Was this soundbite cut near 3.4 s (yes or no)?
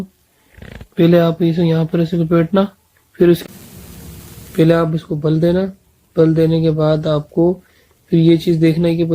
yes